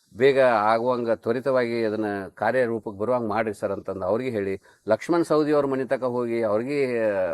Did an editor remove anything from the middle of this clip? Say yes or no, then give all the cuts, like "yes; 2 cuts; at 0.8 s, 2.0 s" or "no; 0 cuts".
no; 0 cuts